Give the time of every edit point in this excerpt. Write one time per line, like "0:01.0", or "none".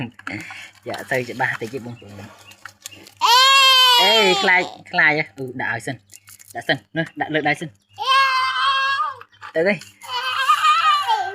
0:09.9